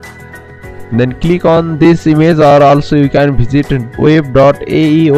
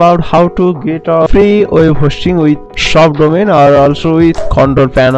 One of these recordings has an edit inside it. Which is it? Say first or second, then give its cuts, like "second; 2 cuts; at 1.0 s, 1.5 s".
second; 3 cuts; at 1.3 s, 2.7 s, 4.4 s